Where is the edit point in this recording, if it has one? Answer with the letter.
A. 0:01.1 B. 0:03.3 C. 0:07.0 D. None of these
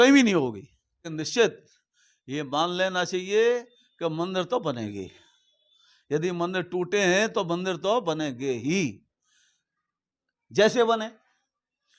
A